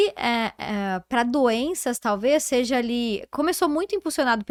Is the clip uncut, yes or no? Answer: yes